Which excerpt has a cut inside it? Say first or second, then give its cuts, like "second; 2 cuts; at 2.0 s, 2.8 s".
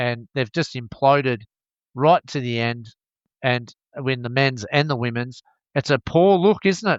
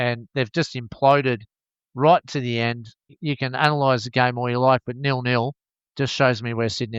second; 1 cut; at 3.2 s